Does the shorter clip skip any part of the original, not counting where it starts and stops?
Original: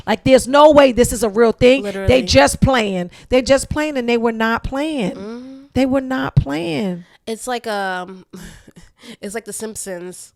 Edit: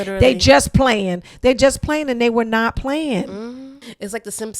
yes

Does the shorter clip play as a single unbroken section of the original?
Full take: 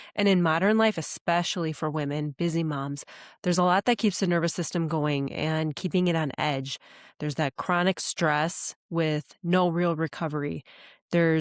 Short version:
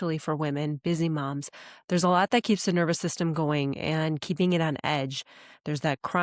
yes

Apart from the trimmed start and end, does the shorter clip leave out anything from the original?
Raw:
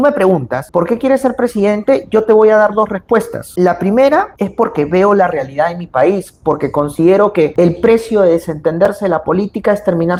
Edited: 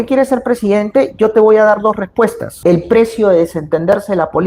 yes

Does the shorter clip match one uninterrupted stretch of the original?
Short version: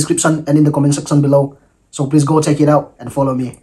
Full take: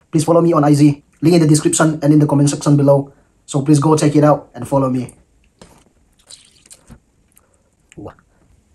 yes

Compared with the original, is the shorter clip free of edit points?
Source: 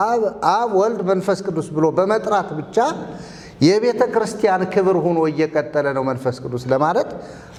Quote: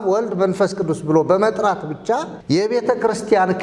no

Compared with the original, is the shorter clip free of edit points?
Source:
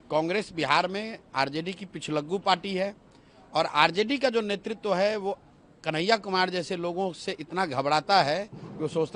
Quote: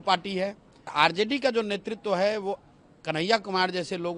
no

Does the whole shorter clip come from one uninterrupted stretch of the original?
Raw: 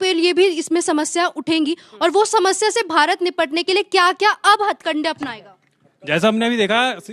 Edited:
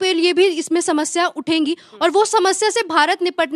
yes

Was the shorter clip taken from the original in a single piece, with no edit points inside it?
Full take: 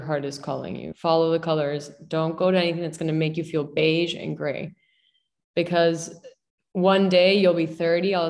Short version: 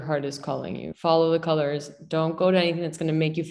yes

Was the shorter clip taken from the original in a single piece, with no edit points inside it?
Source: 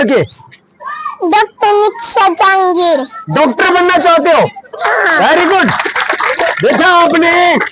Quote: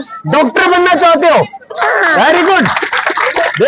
yes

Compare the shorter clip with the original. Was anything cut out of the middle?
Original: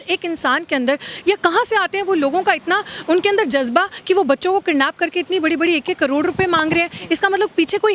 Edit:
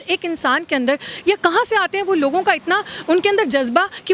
no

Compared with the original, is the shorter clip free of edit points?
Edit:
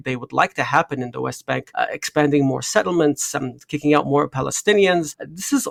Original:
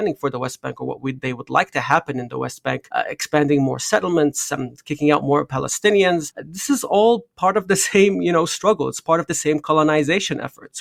yes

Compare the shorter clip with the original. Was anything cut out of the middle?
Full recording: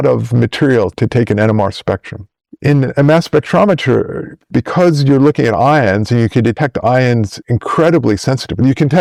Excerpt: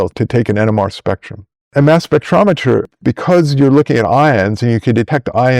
yes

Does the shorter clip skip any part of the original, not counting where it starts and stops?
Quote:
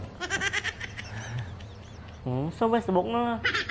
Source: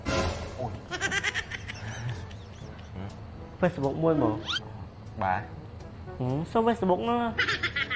yes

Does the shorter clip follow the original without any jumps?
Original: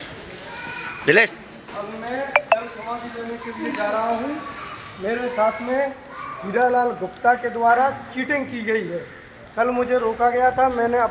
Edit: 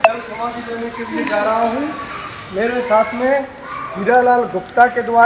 yes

